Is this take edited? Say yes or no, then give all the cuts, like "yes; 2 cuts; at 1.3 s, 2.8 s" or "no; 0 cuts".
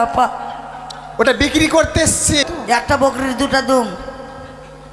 yes; 1 cut; at 2.4 s